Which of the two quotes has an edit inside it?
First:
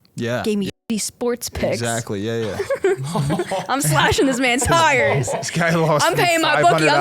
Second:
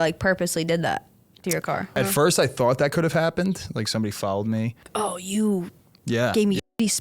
second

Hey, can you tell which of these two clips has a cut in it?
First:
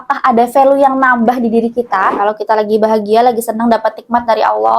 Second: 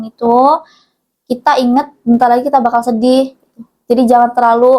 first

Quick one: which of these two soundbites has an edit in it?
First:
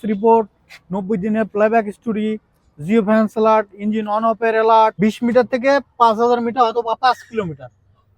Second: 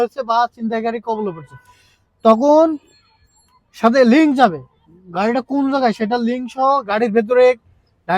first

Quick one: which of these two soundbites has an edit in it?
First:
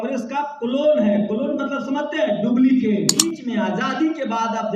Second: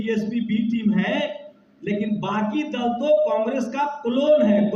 first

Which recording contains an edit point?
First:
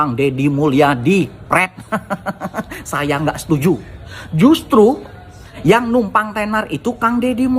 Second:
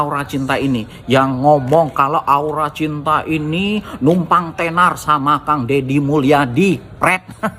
first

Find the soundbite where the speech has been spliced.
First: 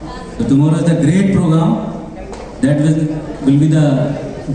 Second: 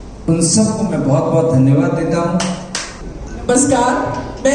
second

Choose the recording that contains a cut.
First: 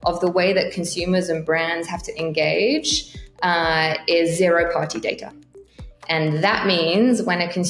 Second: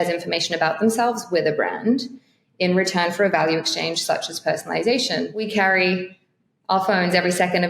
second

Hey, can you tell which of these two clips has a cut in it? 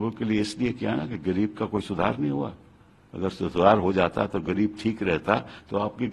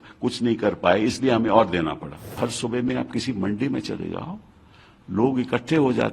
second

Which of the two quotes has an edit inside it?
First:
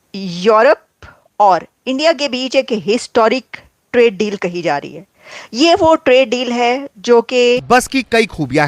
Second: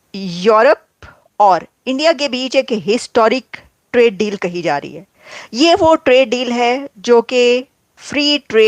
first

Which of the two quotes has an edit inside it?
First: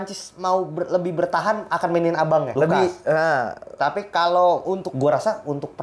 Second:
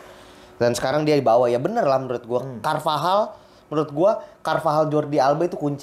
first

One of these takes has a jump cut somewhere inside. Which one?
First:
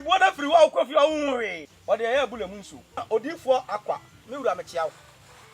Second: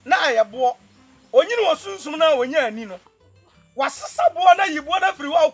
first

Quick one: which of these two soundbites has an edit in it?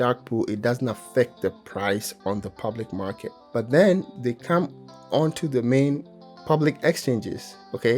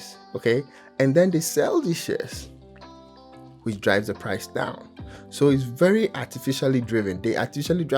first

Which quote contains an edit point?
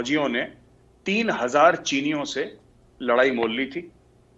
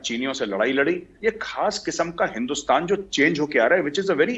second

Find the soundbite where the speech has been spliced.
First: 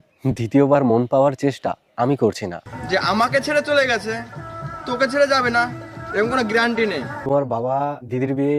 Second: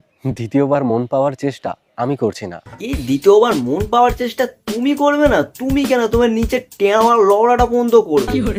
first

